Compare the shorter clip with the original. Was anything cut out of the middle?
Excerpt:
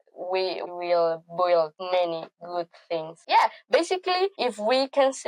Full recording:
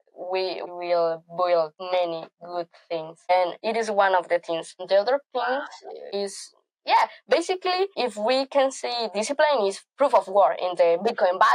yes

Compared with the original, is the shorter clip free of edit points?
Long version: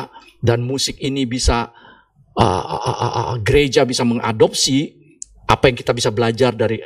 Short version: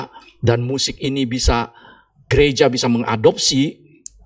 no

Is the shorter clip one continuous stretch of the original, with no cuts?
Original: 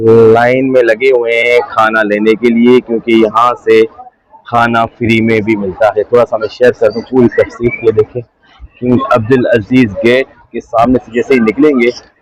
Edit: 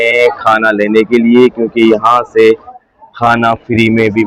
yes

